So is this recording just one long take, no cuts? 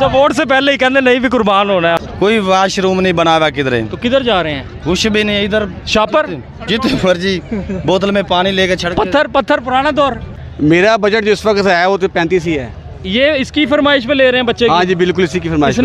no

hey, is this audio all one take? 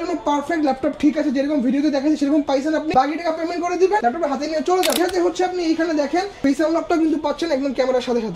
no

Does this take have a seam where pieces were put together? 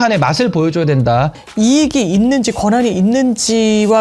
yes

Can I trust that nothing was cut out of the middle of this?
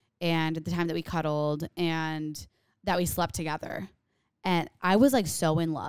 no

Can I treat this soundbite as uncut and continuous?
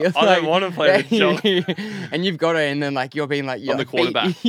yes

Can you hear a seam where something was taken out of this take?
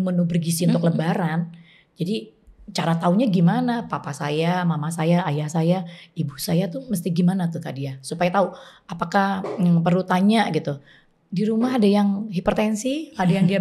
no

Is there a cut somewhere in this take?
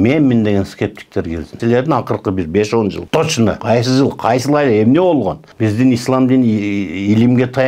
yes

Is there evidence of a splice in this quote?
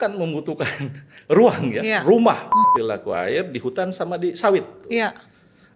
yes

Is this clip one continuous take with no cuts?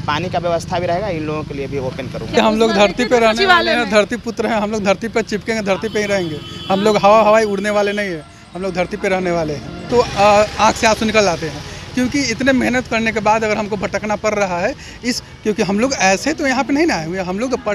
no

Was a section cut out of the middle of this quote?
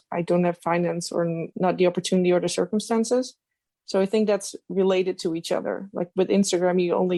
no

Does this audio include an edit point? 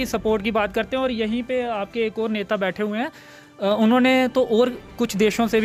no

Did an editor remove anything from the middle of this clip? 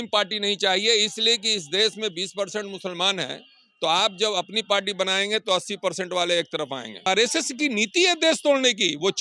yes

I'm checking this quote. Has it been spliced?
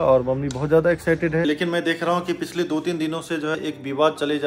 yes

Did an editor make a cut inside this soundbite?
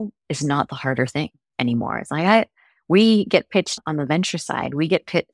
no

